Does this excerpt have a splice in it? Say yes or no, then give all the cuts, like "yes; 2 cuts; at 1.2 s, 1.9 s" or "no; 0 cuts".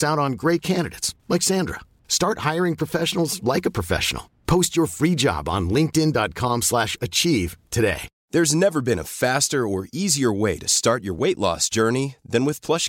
yes; 1 cut; at 8.1 s